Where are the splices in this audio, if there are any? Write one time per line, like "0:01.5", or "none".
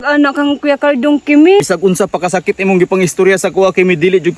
0:01.6